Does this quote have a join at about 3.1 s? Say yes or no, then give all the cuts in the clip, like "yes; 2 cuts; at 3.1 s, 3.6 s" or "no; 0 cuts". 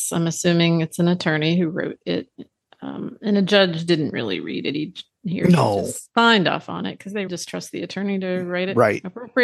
no; 1 cut; at 7.3 s